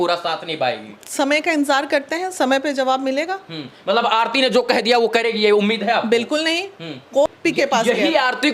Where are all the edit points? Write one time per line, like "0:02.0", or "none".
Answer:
0:07.3